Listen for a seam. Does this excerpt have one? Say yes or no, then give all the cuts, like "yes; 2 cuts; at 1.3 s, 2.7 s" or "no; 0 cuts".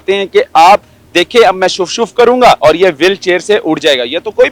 yes; 1 cut; at 2.6 s